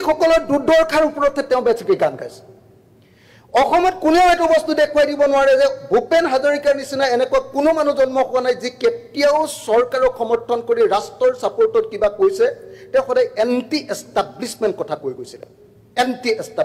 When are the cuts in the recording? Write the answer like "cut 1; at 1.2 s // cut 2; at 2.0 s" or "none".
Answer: none